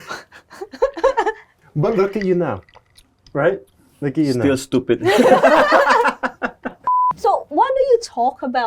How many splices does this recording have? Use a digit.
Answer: 1